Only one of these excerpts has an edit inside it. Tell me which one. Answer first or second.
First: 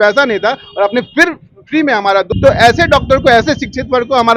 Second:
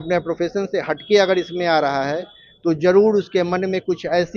first